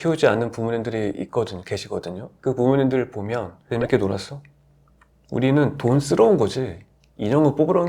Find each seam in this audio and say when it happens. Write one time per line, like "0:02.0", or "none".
0:03.6